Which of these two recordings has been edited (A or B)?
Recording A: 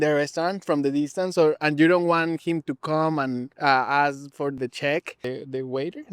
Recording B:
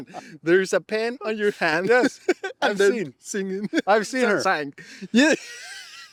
A